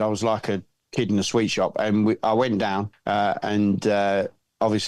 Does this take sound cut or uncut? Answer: cut